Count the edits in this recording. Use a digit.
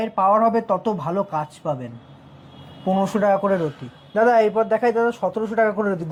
0